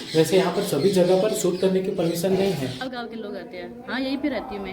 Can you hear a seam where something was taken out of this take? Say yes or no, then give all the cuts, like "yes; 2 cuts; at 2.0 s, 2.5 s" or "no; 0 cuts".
yes; 1 cut; at 2.8 s